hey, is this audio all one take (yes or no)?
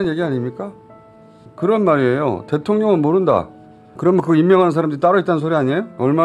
no